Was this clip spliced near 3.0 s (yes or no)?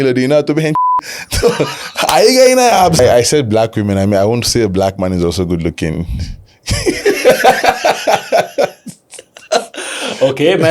yes